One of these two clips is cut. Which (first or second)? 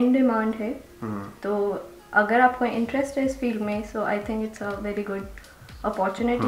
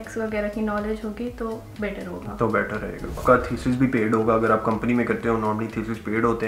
second